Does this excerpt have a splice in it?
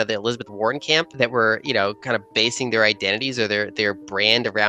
no; 0 cuts

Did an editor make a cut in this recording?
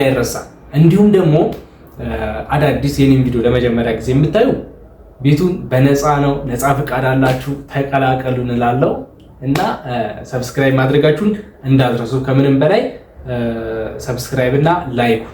no; 0 cuts

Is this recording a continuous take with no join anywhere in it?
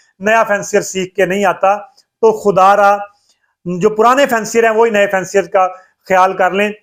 yes; 0 cuts

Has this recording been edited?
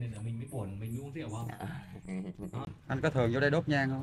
yes; 1 cut; at 2.7 s

